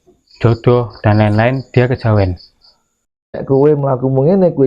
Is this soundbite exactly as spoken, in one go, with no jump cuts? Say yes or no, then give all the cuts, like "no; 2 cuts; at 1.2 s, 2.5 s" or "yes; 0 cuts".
no; 1 cut; at 3.4 s